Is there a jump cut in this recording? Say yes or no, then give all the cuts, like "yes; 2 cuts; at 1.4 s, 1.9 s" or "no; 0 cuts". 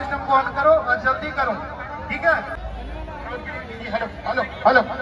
yes; 1 cut; at 2.6 s